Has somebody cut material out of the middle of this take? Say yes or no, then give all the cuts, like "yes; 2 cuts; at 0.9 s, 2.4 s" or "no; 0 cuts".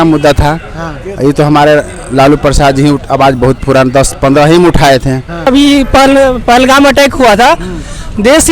yes; 1 cut; at 5.5 s